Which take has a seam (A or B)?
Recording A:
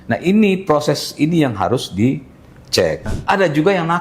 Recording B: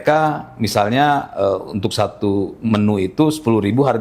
A